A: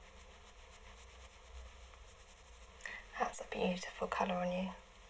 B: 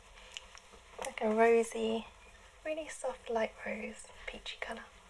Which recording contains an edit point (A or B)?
A